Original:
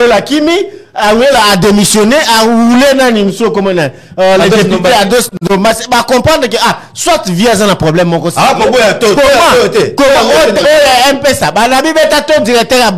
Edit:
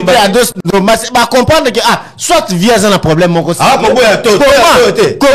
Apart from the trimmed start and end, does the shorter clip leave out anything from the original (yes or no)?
no